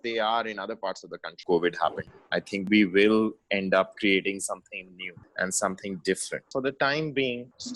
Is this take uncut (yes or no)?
no